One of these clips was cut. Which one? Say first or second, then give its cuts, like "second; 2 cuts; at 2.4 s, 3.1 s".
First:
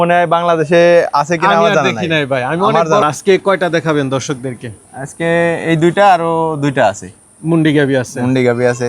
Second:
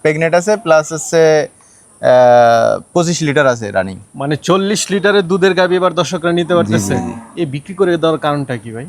first; 1 cut; at 3.0 s